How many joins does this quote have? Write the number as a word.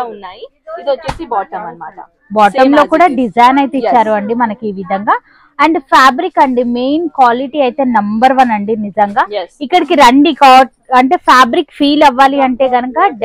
zero